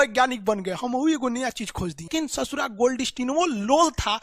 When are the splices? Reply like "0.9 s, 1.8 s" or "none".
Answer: 2.1 s